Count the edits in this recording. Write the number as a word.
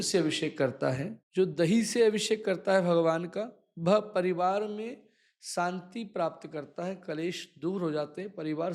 one